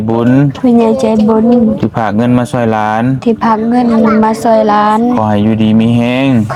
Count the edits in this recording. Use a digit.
0